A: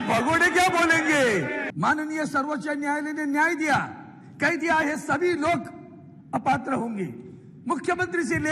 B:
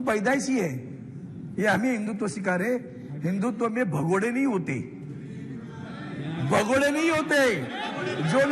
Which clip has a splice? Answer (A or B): A